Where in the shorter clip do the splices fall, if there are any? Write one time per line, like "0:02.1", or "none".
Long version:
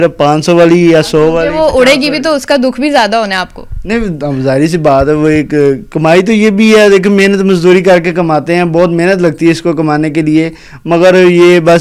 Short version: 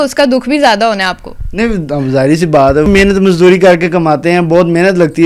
0:02.9